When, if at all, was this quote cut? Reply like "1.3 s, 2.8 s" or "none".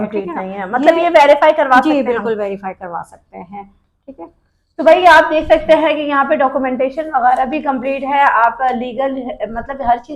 none